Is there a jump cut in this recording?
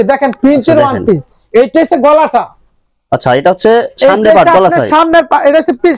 no; 0 cuts

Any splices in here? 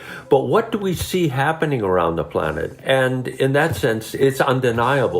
yes; 2 cuts; at 2.7 s, 4.2 s

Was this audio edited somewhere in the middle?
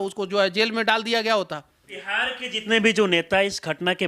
yes; 1 cut; at 2.0 s

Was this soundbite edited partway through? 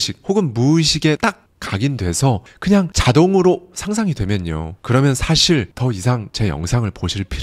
yes; 2 cuts; at 1.2 s, 6.0 s

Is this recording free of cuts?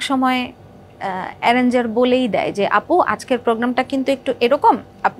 yes; 0 cuts

